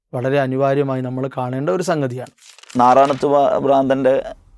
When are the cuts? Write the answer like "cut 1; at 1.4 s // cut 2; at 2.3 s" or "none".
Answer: cut 1; at 2.6 s